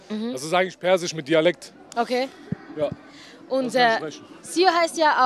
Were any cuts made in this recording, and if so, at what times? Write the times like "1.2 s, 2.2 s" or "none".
none